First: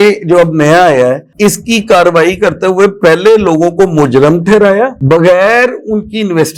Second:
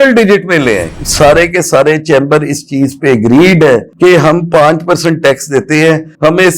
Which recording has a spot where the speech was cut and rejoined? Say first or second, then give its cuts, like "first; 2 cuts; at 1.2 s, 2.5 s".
second; 1 cut; at 0.9 s